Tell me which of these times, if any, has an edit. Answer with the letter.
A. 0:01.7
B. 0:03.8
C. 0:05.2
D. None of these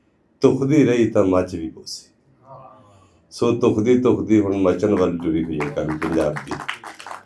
D